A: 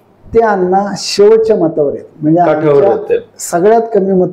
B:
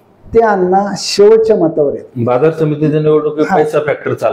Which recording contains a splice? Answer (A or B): B